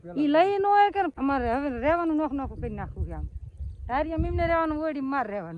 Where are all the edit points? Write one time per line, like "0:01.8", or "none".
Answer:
0:01.1